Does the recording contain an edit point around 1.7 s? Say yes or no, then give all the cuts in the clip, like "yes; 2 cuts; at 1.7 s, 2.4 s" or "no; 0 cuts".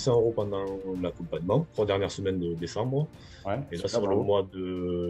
yes; 1 cut; at 1.7 s